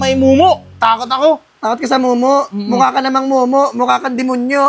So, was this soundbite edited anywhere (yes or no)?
no